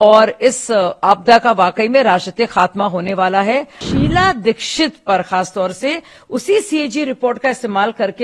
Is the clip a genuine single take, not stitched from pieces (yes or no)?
no